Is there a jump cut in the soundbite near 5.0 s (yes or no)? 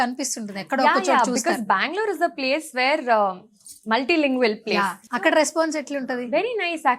yes